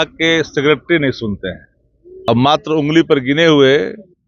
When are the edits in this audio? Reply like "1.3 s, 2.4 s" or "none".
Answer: 2.3 s